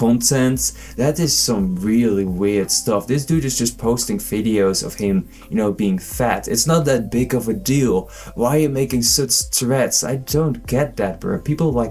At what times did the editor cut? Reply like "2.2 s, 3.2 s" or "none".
none